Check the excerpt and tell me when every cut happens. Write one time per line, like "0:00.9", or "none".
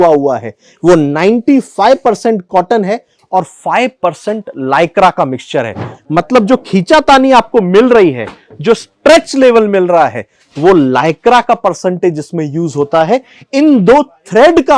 0:05.9